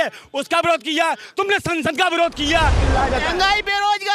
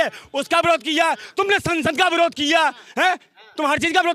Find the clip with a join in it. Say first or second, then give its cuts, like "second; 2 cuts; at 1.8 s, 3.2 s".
first; 1 cut; at 2.8 s